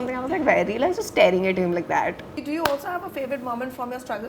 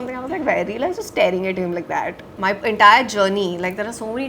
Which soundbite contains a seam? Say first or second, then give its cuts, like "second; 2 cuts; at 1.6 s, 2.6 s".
second; 1 cut; at 2.4 s